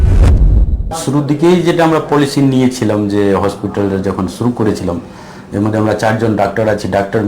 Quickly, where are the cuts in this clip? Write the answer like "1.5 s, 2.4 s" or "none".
0.9 s